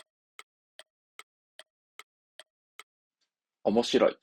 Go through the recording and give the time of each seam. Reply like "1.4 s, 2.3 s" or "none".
3.0 s